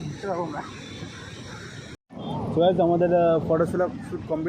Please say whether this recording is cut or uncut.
cut